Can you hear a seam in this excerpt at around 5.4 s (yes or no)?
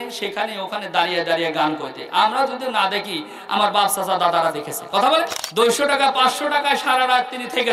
yes